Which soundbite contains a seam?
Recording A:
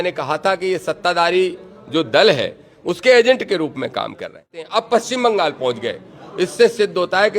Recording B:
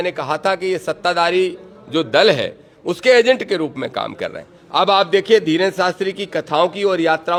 A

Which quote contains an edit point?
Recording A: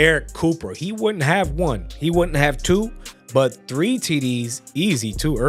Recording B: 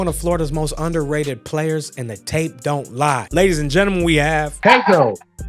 B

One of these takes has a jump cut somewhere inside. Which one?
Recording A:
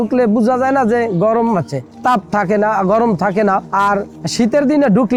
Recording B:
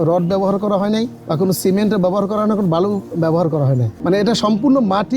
B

